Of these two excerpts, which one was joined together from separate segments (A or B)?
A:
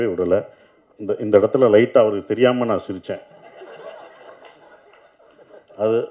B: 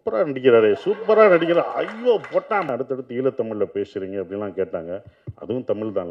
B